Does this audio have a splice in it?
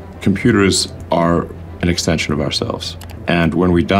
yes; 2 cuts; at 0.9 s, 3.2 s

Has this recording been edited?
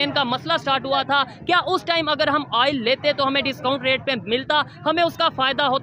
no; 0 cuts

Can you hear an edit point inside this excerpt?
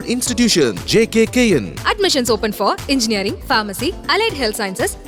no; 0 cuts

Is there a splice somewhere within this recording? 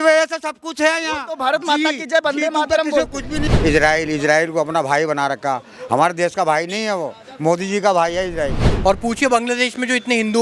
yes; 2 cuts; at 3.4 s, 8.7 s

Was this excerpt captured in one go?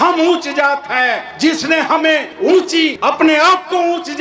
no; 1 cut; at 3.0 s

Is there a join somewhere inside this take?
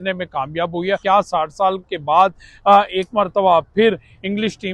yes; 1 cut; at 1.0 s

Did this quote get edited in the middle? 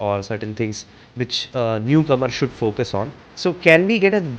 yes; 1 cut; at 3.2 s

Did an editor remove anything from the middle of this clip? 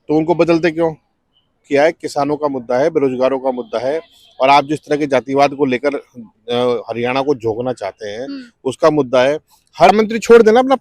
yes; 2 cuts; at 1.6 s, 9.9 s

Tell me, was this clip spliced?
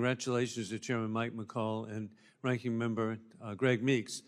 yes; 1 cut; at 3.1 s

